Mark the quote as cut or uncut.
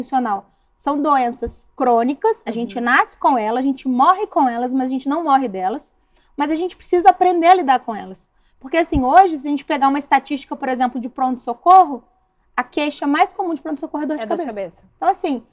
uncut